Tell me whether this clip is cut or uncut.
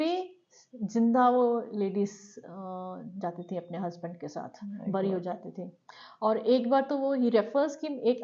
uncut